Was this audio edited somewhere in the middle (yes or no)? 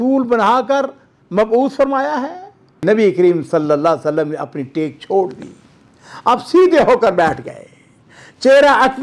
yes